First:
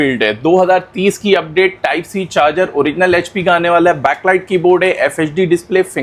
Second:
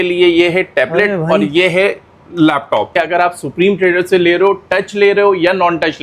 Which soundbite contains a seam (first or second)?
second